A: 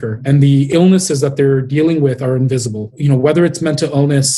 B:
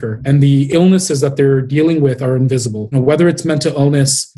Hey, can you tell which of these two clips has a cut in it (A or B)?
B